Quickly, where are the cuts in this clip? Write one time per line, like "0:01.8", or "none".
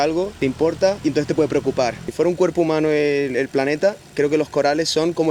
0:00.9
0:02.0